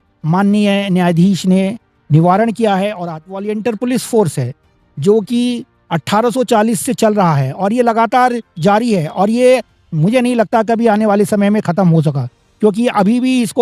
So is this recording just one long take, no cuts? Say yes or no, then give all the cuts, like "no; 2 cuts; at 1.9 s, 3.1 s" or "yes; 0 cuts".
no; 1 cut; at 3.5 s